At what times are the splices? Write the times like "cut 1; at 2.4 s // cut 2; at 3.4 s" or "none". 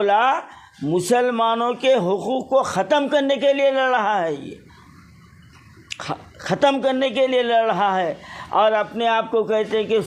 none

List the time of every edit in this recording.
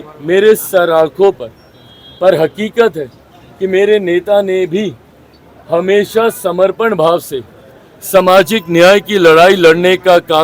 none

